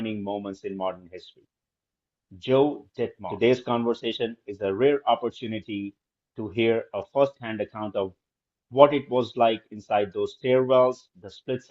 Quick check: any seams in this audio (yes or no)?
yes